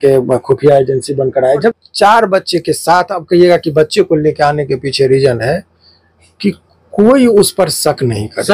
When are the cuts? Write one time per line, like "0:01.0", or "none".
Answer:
0:01.7